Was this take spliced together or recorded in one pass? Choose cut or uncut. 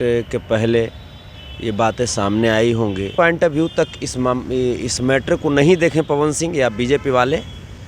cut